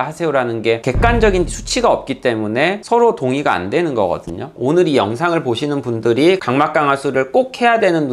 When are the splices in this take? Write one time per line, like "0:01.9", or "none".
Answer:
0:04.5